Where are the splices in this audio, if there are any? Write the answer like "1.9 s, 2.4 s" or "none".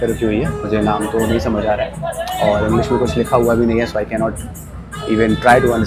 none

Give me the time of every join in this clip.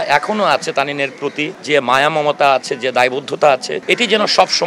1.5 s, 3.7 s

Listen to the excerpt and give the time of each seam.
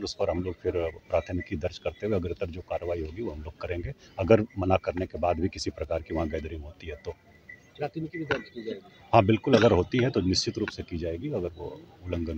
none

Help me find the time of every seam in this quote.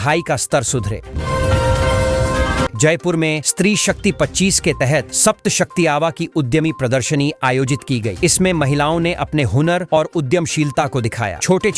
1.1 s, 2.7 s

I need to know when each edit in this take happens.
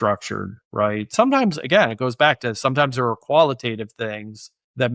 1.1 s

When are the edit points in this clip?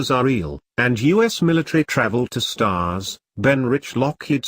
2.3 s

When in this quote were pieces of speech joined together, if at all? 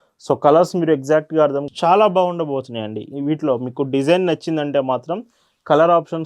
1.7 s

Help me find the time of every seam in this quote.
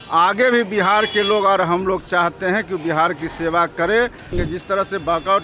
4.3 s

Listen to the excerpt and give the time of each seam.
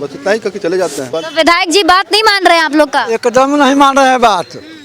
1.1 s

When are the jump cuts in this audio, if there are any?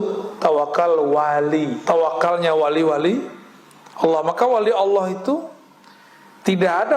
1.8 s

